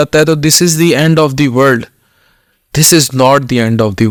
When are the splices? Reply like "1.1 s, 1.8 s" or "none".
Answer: none